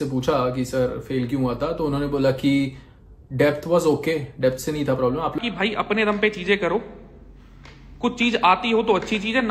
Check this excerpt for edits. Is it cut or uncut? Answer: cut